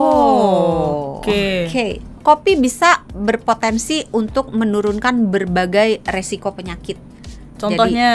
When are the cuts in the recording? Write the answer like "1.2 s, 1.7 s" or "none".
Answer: 2.2 s